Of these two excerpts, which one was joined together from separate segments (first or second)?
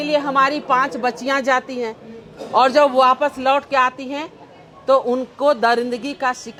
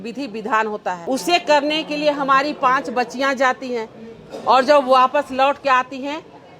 second